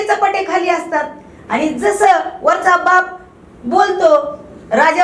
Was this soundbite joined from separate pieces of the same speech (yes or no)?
no